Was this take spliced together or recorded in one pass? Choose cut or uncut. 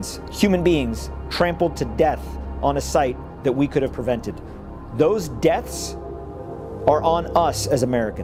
uncut